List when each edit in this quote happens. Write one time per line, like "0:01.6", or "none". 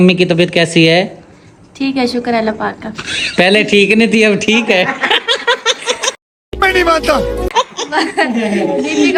none